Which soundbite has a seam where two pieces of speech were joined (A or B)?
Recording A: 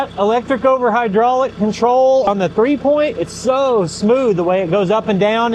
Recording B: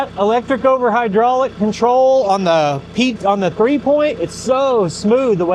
A